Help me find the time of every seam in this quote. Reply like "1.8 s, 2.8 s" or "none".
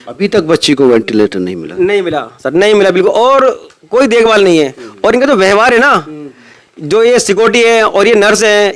none